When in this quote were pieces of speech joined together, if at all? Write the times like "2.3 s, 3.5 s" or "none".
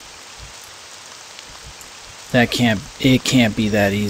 2.3 s

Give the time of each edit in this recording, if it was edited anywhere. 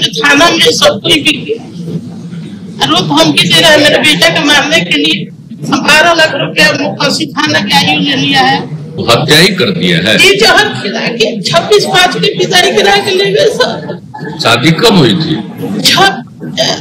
9.0 s

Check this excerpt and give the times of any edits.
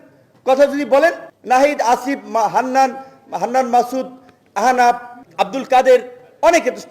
1.3 s, 5.2 s

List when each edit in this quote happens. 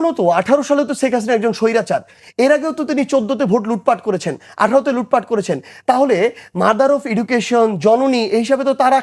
none

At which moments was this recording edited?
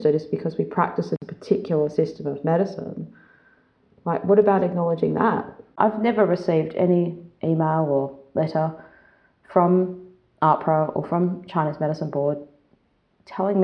1.1 s, 5.8 s

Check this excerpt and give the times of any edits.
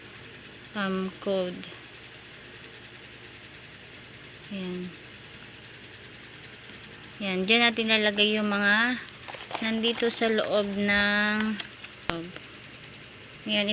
12.1 s

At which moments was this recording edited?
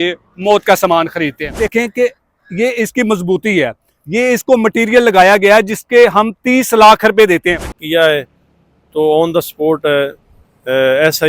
1.7 s, 7.8 s

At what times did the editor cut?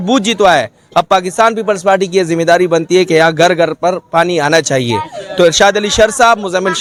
none

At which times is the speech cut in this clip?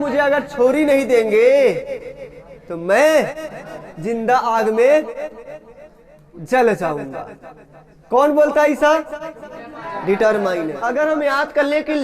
10.8 s

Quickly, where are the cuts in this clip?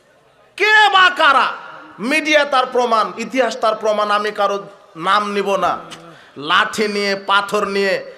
none

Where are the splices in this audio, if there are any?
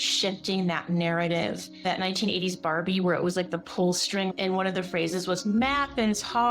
1.8 s, 4.3 s

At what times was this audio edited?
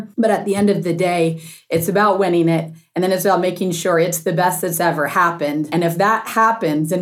5.7 s

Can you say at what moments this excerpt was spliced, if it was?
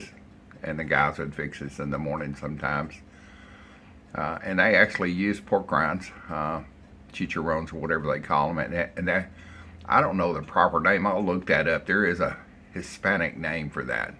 none

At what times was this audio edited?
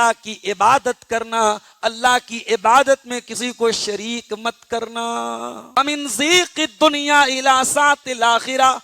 5.8 s

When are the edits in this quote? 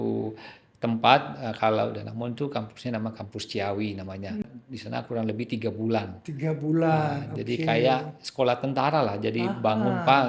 4.4 s

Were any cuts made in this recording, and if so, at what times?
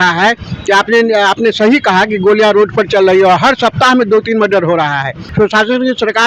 5.2 s

